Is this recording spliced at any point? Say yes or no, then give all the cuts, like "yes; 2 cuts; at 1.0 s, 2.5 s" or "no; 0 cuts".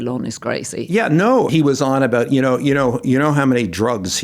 yes; 1 cut; at 1.5 s